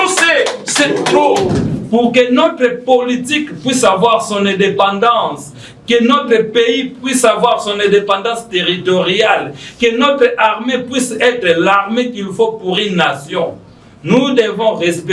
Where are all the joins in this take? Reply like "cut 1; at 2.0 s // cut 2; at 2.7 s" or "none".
cut 1; at 1.7 s